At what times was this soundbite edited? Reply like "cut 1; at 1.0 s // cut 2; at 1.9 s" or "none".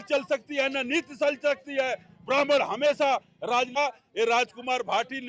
cut 1; at 3.7 s